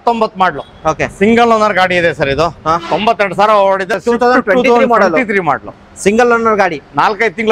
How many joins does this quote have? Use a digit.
1